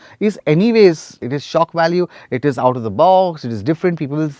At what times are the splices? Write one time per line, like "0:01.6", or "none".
0:01.2